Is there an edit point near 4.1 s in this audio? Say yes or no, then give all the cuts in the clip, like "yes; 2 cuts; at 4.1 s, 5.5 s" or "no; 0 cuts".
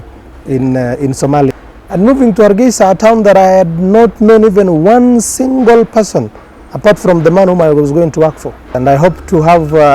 no; 2 cuts; at 1.5 s, 8.6 s